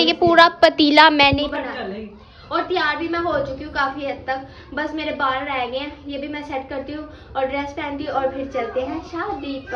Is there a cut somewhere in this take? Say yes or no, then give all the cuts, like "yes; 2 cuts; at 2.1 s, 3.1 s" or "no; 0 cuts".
no; 0 cuts